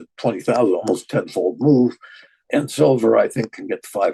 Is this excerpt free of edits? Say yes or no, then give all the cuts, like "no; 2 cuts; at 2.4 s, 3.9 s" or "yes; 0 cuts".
no; 1 cut; at 2.3 s